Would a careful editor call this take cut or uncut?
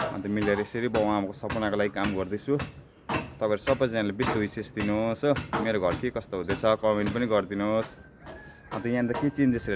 uncut